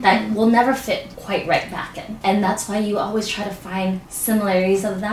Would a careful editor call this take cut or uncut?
cut